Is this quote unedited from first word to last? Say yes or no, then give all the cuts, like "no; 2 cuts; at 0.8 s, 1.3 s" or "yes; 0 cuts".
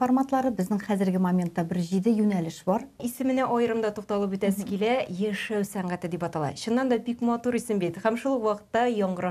no; 1 cut; at 3.1 s